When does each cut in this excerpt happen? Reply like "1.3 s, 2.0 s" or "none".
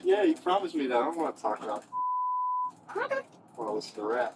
none